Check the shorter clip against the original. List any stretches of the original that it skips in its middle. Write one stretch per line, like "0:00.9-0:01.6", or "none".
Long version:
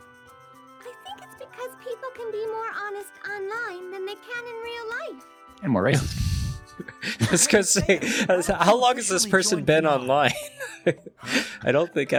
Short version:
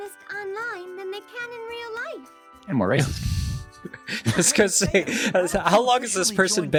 none